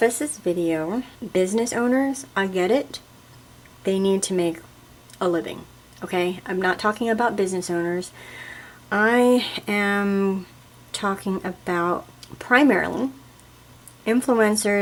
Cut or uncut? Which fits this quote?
uncut